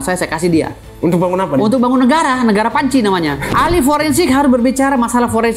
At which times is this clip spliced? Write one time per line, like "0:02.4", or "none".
0:03.5